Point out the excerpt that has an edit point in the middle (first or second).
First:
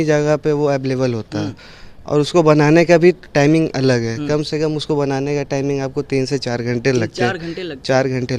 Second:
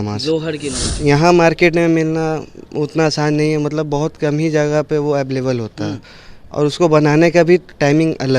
second